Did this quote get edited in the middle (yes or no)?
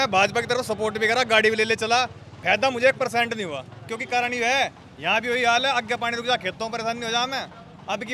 yes